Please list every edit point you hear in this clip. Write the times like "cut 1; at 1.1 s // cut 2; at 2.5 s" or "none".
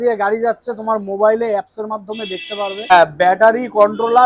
cut 1; at 2.9 s